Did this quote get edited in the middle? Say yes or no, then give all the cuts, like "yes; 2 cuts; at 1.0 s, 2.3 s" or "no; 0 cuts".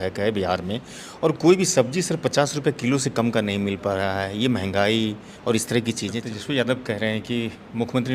yes; 1 cut; at 6.3 s